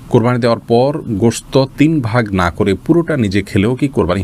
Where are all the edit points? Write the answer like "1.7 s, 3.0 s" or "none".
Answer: none